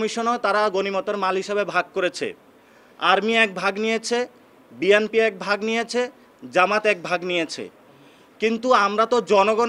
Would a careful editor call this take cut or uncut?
uncut